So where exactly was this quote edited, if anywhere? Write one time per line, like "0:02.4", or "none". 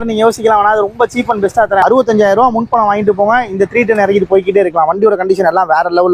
0:01.8